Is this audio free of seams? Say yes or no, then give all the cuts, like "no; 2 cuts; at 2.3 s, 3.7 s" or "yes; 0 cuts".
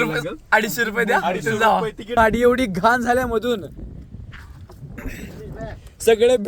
no; 1 cut; at 2.2 s